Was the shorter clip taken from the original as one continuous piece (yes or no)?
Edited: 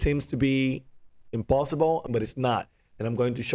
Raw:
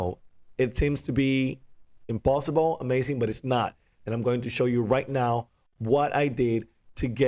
no